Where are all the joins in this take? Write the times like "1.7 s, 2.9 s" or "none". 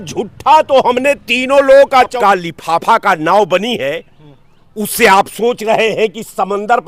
2.1 s